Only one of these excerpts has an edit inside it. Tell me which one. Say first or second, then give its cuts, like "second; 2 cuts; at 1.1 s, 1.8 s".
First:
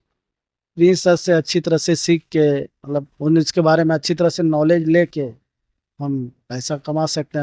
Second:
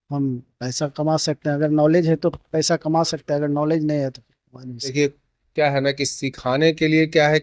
second; 1 cut; at 4.9 s